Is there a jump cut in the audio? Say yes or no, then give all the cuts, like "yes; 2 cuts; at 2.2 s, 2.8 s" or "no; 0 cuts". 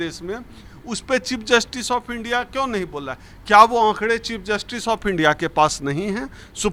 no; 0 cuts